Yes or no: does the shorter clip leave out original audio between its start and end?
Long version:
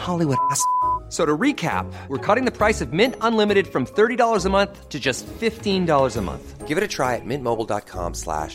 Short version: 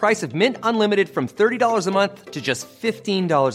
no